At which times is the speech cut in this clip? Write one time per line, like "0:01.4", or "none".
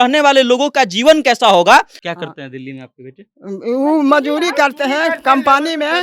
0:02.0